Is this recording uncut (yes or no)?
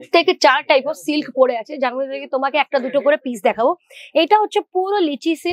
yes